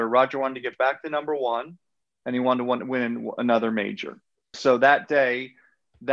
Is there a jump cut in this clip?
yes; 1 cut; at 4.5 s

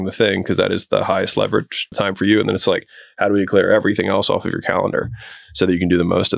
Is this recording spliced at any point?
yes; 1 cut; at 1.9 s

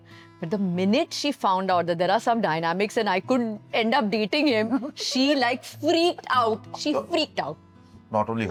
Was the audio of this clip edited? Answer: no; 0 cuts

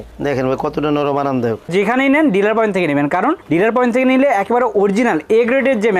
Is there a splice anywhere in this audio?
yes; 1 cut; at 1.7 s

